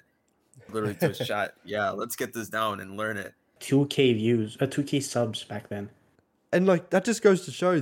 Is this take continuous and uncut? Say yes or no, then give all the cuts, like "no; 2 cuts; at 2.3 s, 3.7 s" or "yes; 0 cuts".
no; 1 cut; at 3.6 s